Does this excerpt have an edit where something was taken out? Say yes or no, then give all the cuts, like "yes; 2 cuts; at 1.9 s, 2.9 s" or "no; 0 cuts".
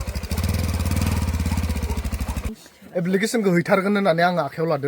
yes; 1 cut; at 2.5 s